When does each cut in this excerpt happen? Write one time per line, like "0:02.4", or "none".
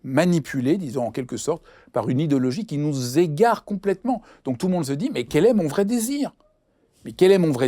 none